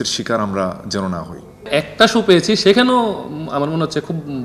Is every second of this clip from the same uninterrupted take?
no; 1 cut; at 1.7 s

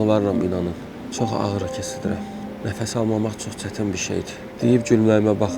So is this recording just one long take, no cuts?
no; 3 cuts; at 1.0 s, 2.4 s, 4.4 s

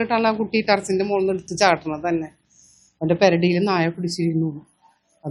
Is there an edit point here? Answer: no; 0 cuts

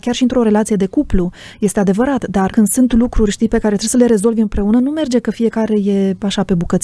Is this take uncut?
no; 1 cut; at 2.5 s

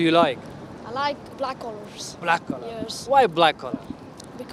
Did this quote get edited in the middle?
no; 0 cuts

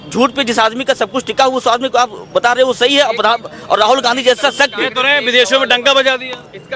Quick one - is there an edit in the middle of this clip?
no; 0 cuts

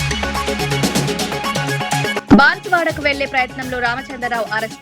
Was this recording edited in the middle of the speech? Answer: yes; 1 cut; at 2.2 s

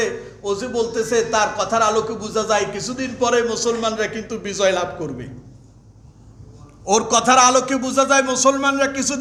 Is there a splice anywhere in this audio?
no; 0 cuts

